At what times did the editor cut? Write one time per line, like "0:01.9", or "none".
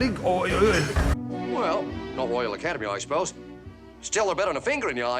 none